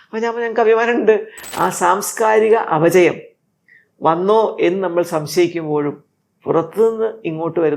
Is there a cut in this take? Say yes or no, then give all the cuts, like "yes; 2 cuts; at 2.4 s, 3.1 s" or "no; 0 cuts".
yes; 1 cut; at 1.4 s